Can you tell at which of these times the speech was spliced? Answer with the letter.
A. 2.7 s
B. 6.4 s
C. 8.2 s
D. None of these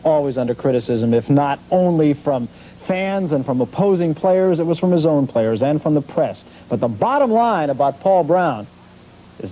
B